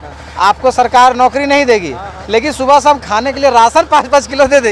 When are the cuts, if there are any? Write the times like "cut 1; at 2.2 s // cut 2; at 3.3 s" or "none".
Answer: none